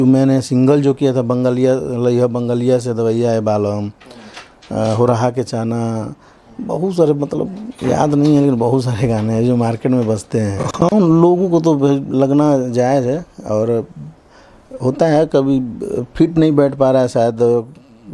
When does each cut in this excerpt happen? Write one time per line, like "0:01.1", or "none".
0:11.1